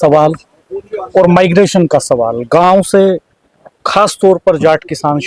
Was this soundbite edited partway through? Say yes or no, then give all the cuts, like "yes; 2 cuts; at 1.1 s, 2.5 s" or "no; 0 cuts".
no; 0 cuts